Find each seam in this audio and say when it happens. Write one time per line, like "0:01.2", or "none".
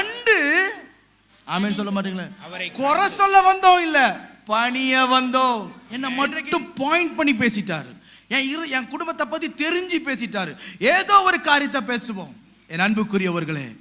0:06.1